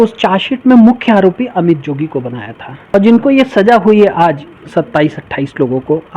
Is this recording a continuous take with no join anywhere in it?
no; 1 cut; at 2.9 s

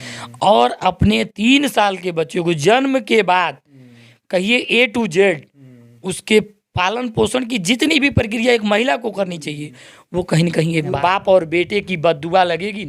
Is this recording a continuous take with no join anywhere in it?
no; 1 cut; at 10.9 s

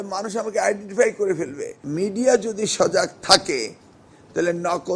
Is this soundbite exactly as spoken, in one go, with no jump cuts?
no; 1 cut; at 1.8 s

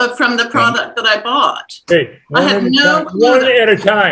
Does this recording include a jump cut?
no; 0 cuts

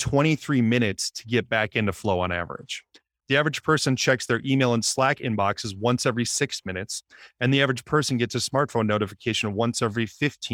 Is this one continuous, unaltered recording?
no; 1 cut; at 3.1 s

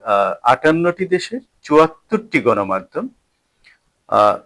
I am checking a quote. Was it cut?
no; 0 cuts

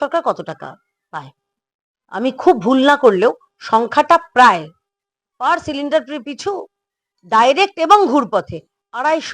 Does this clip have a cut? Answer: no; 0 cuts

